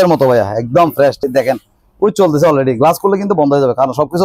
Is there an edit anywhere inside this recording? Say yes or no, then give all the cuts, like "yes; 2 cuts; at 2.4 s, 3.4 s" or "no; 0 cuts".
yes; 1 cut; at 1.2 s